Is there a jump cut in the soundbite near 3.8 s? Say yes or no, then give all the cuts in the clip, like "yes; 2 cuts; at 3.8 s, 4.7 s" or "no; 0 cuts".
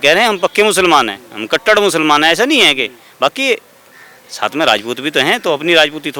no; 0 cuts